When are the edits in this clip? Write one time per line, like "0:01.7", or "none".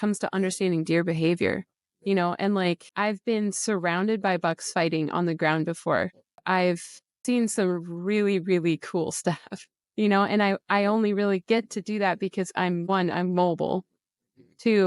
0:02.9
0:06.3
0:07.2